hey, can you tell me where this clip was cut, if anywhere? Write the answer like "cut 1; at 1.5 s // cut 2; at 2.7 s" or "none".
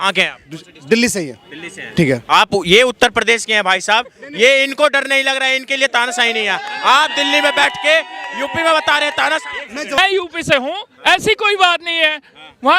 cut 1; at 10.0 s